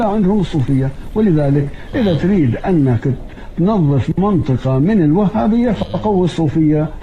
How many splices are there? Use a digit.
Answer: 0